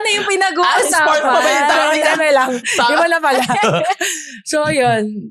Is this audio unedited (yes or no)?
yes